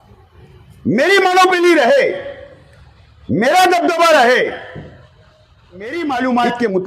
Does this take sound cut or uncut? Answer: cut